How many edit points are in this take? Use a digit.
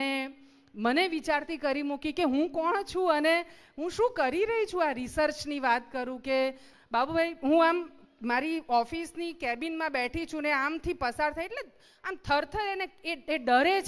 1